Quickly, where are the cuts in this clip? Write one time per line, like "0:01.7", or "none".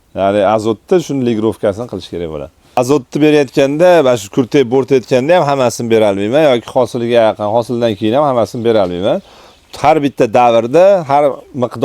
0:02.8